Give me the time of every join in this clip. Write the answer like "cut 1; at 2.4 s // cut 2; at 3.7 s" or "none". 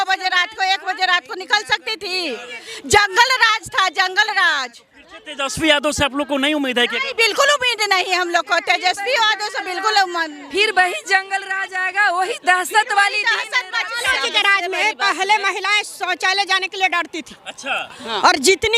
none